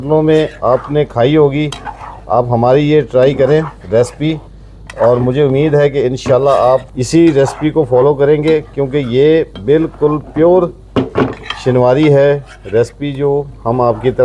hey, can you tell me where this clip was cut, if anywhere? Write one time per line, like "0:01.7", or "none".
none